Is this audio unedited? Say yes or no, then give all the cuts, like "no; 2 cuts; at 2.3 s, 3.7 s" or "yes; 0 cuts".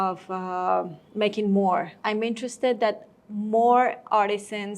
no; 2 cuts; at 1.0 s, 1.9 s